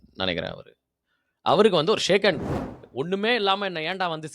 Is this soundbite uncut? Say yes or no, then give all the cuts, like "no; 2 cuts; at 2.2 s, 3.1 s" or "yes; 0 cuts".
no; 1 cut; at 2.9 s